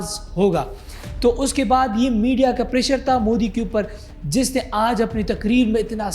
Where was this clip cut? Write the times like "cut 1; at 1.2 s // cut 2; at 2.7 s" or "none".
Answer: none